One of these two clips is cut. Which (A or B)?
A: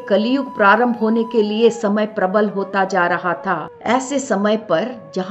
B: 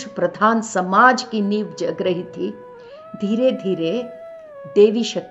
A